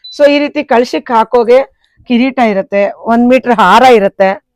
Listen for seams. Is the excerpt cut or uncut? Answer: uncut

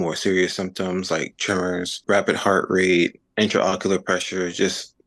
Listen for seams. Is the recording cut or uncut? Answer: cut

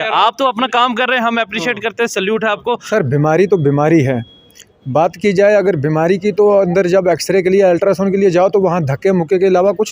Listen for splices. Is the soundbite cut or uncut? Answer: cut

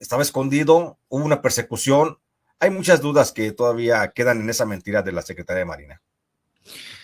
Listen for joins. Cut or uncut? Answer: uncut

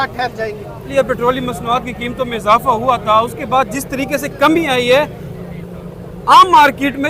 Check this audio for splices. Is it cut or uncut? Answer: cut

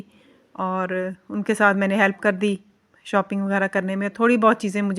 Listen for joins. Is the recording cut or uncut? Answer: uncut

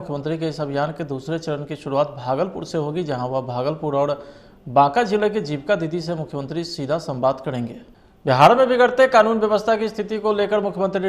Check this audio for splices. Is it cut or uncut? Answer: cut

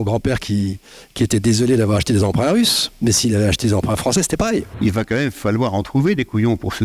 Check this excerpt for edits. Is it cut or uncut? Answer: cut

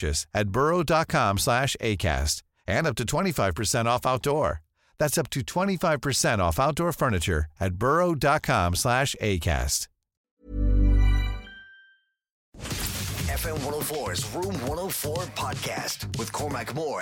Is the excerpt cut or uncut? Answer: cut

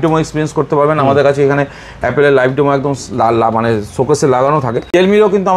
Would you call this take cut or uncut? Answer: uncut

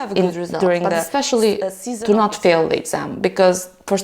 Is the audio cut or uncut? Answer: cut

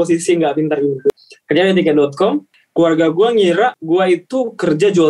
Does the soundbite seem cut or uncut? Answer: cut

